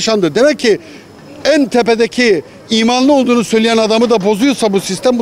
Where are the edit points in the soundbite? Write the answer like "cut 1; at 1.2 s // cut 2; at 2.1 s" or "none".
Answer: none